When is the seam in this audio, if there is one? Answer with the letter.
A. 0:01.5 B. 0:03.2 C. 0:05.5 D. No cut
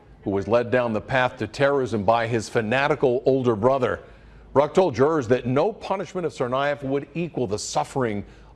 D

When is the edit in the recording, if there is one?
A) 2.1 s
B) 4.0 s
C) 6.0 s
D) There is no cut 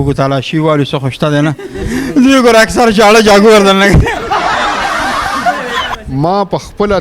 C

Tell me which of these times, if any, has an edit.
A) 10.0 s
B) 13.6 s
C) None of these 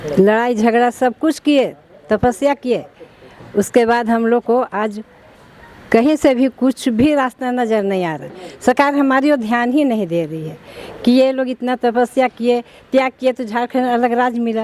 C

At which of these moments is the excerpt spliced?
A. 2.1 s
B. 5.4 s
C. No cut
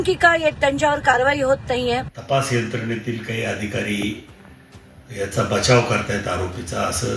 A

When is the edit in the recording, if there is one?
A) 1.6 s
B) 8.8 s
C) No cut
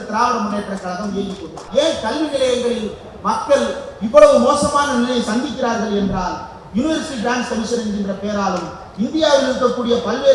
A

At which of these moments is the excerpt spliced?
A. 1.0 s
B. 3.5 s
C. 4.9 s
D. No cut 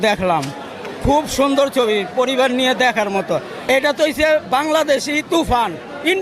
B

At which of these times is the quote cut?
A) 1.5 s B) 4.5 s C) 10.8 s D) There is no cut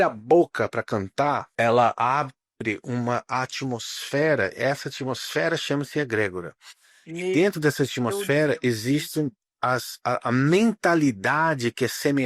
A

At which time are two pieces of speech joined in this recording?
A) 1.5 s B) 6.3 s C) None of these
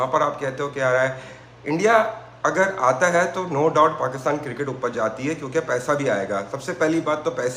C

